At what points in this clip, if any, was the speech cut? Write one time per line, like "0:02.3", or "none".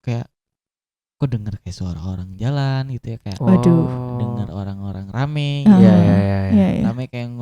none